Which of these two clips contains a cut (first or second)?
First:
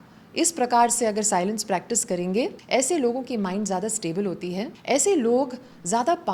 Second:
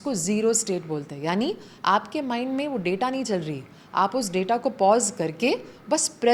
first